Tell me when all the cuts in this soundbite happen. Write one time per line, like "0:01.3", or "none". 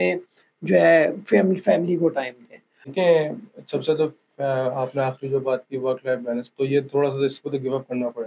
0:02.9